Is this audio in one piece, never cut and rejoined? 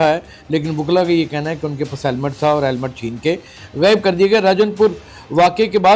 yes; 0 cuts

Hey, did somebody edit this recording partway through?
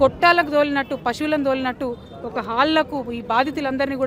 no; 0 cuts

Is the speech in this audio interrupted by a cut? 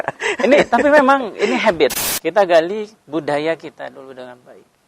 yes; 1 cut; at 2.1 s

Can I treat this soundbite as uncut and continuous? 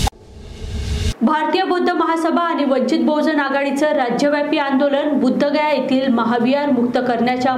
yes; 0 cuts

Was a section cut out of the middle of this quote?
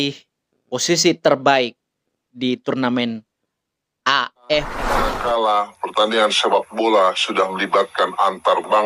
yes; 1 cut; at 5.0 s

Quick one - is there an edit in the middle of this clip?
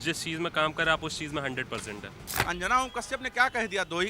yes; 1 cut; at 2.3 s

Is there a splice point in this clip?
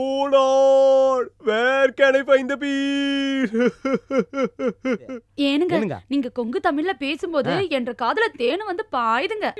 yes; 1 cut; at 5.2 s

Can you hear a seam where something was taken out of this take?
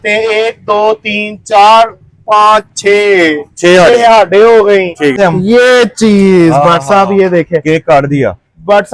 yes; 1 cut; at 5.2 s

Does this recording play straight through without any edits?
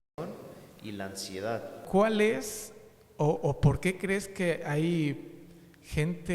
no; 1 cut; at 1.8 s

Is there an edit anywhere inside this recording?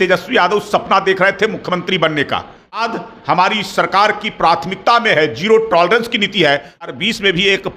yes; 2 cuts; at 2.7 s, 6.8 s

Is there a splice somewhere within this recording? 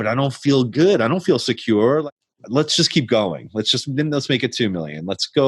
yes; 1 cut; at 2.0 s

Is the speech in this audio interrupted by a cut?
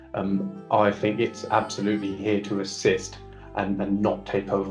no; 0 cuts

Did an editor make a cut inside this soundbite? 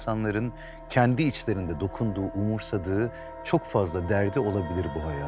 no; 0 cuts

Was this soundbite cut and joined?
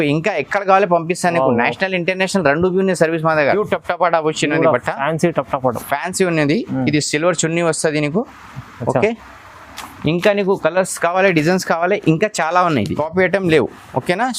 yes; 2 cuts; at 3.5 s, 13.0 s

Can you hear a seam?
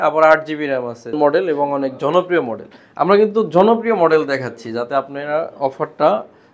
yes; 1 cut; at 1.1 s

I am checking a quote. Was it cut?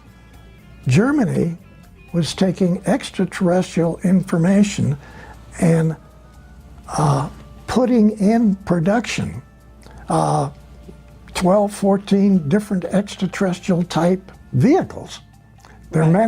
no; 0 cuts

